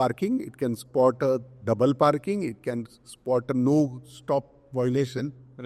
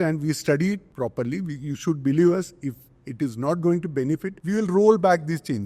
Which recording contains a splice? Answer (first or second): second